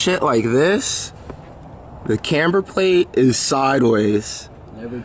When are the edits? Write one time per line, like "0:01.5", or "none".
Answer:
none